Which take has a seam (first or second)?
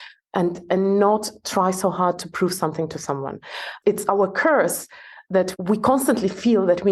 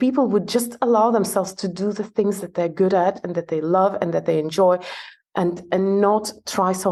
first